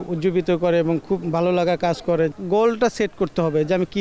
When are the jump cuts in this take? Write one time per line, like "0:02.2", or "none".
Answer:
0:02.3